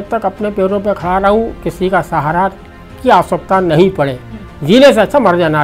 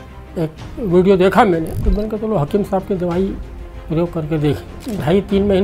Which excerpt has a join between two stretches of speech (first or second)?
second